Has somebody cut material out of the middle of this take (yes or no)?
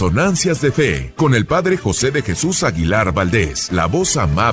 yes